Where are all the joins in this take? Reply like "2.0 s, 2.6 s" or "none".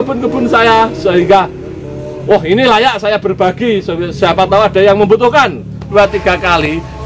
5.9 s